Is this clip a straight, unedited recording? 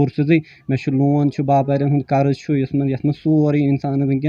yes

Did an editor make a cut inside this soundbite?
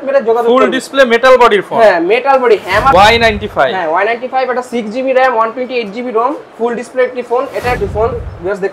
yes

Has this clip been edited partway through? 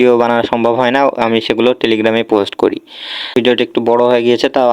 yes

